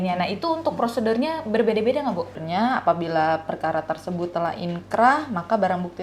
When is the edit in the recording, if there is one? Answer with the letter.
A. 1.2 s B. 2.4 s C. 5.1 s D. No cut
B